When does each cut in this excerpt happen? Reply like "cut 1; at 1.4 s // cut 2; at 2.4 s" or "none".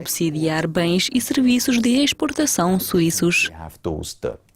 cut 1; at 3.6 s